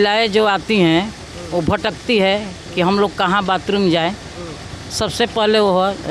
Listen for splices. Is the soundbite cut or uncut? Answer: uncut